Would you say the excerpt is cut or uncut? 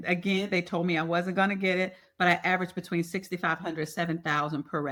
uncut